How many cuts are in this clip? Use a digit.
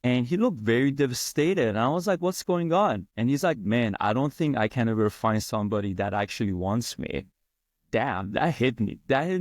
1